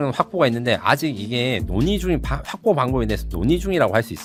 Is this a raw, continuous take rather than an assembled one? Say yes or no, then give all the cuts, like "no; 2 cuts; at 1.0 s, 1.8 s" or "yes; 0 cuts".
yes; 0 cuts